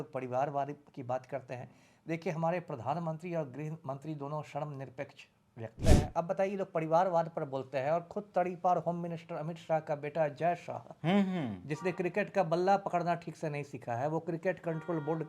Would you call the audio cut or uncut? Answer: cut